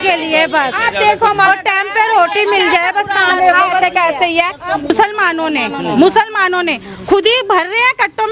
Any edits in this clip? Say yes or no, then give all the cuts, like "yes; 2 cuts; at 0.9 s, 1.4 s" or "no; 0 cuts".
yes; 1 cut; at 4.9 s